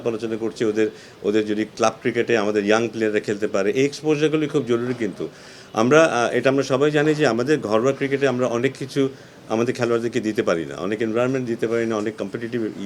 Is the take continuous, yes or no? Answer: yes